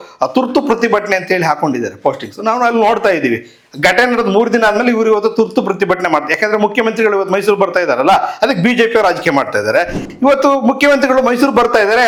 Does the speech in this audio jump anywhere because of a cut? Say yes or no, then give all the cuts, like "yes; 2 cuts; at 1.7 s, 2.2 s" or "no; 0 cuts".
no; 0 cuts